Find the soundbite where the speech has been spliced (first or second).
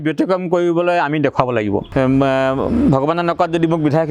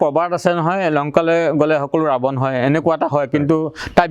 first